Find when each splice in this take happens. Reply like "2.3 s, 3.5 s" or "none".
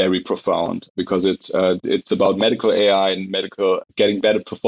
none